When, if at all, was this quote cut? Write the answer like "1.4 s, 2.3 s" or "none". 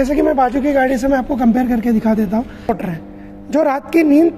2.8 s